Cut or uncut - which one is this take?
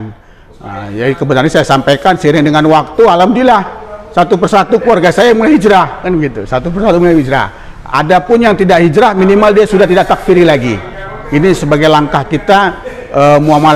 uncut